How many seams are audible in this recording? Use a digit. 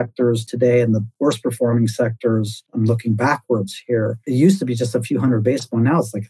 3